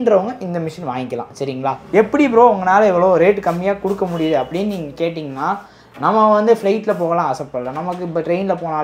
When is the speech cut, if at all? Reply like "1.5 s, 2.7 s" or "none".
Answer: 1.8 s